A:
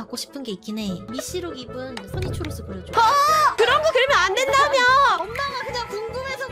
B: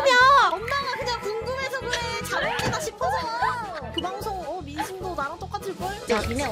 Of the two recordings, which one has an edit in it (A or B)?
A